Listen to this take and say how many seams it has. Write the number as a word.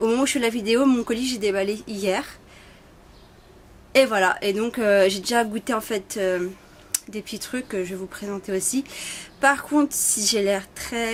zero